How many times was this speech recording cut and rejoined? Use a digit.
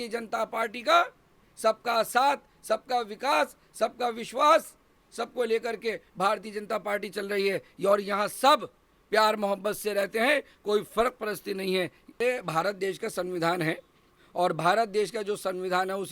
1